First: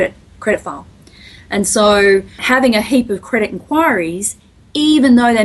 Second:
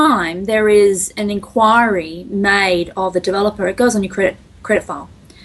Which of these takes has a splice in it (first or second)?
first